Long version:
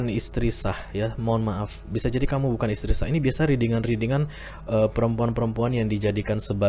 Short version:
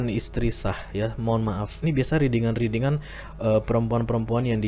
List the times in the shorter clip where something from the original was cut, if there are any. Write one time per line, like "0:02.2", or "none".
0:01.8